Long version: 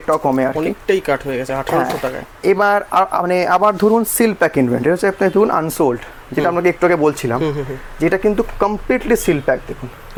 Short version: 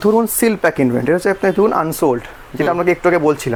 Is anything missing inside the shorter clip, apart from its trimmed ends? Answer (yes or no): no